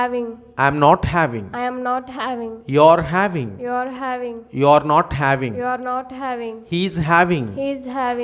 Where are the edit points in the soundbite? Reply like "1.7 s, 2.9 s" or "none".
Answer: none